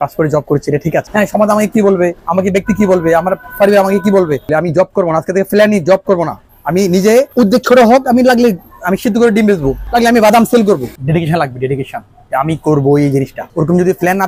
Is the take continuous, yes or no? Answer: no